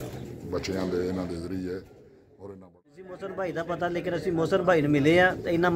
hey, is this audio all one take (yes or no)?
no